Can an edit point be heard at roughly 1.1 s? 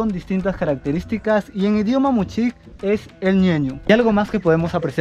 no; 1 cut; at 3.8 s

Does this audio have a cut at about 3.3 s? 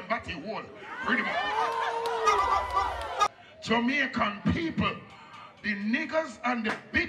yes; 1 cut; at 3.3 s

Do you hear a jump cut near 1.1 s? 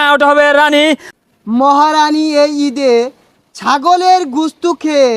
yes; 1 cut; at 1.1 s

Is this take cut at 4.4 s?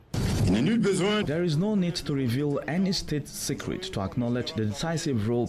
no; 1 cut; at 1.2 s

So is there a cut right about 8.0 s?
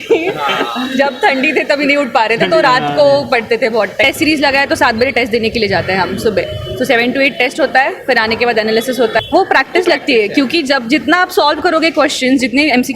no; 2 cuts; at 4.0 s, 9.2 s

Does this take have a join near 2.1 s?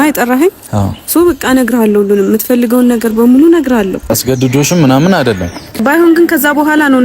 no; 2 cuts; at 4.1 s, 5.8 s

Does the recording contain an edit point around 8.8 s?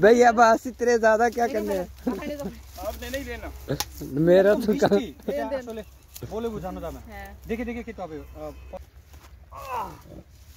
yes; 1 cut; at 8.8 s

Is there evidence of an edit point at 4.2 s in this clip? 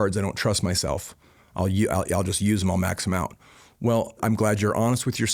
yes; 1 cut; at 4.2 s

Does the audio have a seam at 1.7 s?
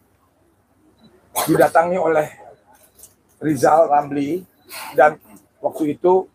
no; 0 cuts

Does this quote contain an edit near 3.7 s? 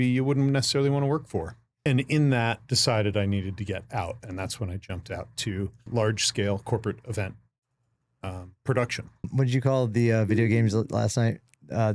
no; 3 cuts; at 1.8 s, 5.9 s, 9.3 s

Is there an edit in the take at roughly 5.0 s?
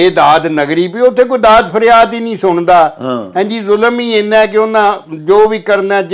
no; 0 cuts

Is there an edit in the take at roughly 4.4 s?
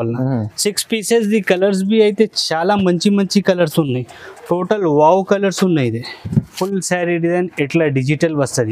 no; 1 cut; at 6.5 s

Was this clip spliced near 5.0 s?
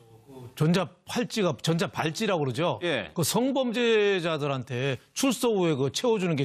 yes; 1 cut; at 5.0 s

